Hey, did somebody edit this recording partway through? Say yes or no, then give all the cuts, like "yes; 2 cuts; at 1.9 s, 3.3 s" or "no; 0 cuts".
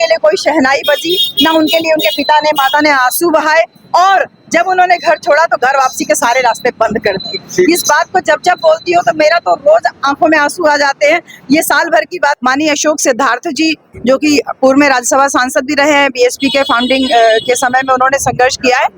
yes; 1 cut; at 12.4 s